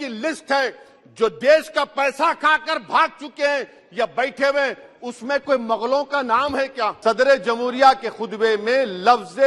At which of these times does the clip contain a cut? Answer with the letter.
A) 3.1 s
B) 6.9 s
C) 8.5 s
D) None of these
B